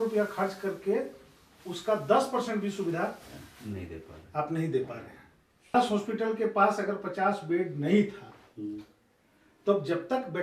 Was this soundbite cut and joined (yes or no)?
yes